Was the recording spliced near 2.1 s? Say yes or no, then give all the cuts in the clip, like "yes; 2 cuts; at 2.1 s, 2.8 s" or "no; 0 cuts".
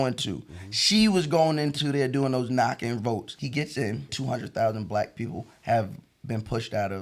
no; 2 cuts; at 3.3 s, 4.1 s